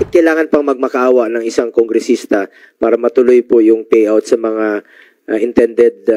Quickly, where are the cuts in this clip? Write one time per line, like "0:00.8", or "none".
none